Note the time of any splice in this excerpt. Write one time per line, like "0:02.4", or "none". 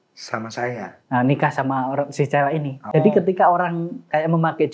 0:02.8